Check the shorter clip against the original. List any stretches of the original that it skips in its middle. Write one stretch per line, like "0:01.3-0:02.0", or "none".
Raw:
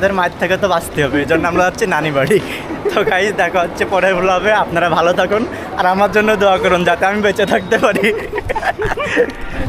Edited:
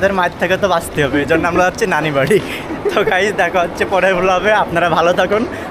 none